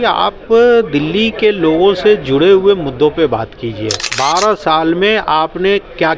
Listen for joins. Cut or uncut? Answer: cut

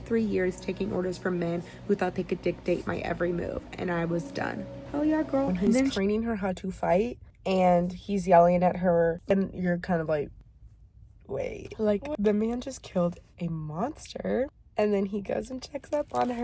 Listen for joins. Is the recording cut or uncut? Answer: cut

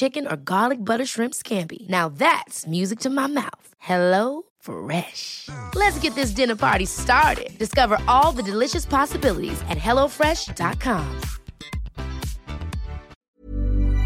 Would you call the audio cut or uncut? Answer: cut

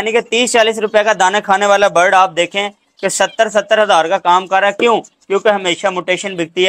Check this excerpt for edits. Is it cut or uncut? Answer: uncut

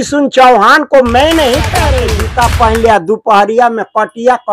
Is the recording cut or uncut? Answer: cut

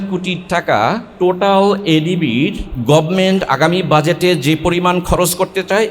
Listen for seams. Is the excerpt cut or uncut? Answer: cut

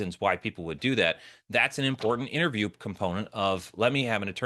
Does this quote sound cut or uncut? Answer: uncut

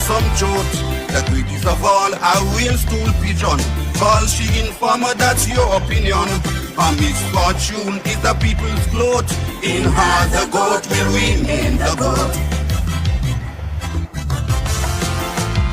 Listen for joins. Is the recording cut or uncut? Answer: uncut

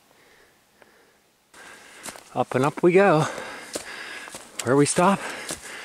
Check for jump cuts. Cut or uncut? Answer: cut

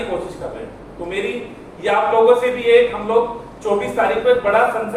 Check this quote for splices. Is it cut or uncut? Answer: uncut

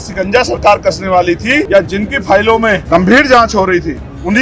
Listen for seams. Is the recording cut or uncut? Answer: cut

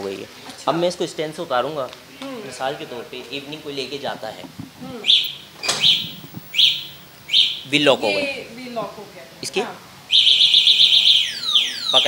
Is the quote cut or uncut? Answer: uncut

